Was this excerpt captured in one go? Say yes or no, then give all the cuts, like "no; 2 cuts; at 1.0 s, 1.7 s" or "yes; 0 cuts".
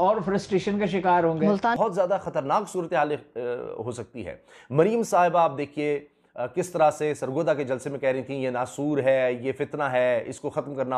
no; 1 cut; at 1.8 s